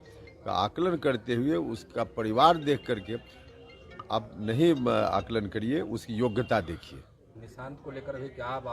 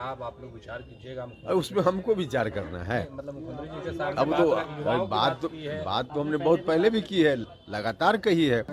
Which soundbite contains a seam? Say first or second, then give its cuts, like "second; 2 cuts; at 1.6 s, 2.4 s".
first; 1 cut; at 7.4 s